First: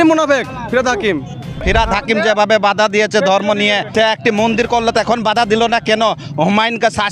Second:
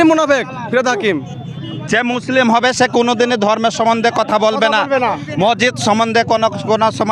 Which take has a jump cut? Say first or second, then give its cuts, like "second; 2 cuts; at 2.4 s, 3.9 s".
first; 2 cuts; at 1.6 s, 3.9 s